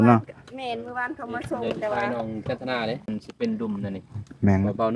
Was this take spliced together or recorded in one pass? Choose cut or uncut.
cut